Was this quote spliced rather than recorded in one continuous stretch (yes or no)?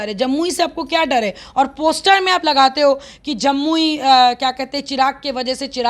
no